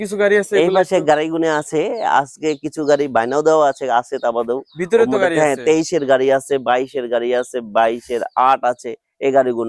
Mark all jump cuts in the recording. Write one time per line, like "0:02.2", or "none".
none